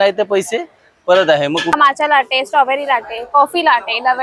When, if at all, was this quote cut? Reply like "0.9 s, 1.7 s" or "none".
1.7 s